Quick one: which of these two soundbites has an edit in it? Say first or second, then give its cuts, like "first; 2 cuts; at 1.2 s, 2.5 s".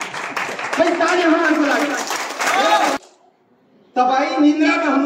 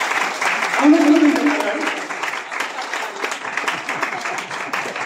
first; 1 cut; at 3.0 s